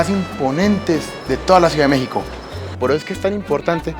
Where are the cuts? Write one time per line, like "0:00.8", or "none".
0:02.6

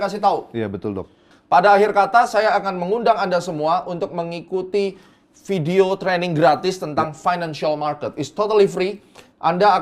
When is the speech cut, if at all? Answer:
0:01.2

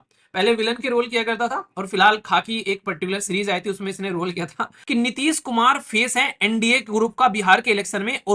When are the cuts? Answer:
0:04.7

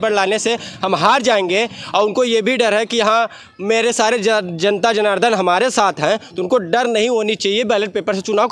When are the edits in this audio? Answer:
none

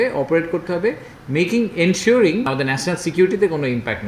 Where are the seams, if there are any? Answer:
0:02.5

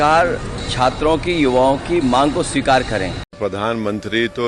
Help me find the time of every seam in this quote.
0:03.2

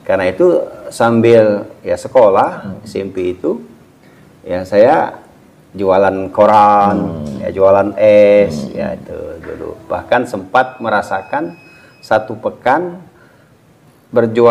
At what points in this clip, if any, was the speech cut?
none

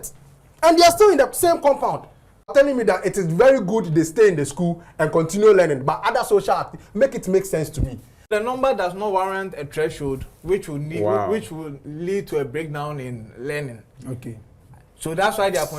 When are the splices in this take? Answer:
0:02.5
0:08.3

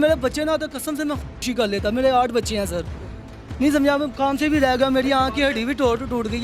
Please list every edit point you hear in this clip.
none

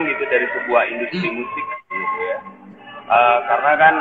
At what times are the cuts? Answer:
none

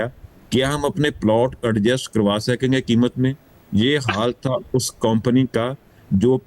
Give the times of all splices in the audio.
none

